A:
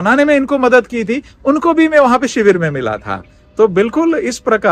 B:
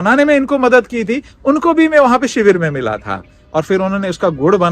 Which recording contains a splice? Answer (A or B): B